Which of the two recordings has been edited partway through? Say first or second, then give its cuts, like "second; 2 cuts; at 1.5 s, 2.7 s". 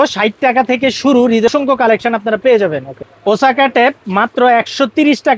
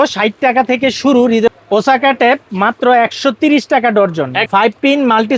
second; 2 cuts; at 1.5 s, 4.4 s